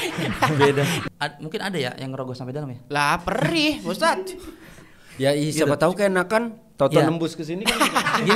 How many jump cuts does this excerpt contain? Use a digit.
1